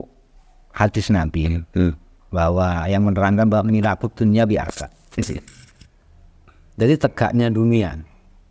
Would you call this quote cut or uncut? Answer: uncut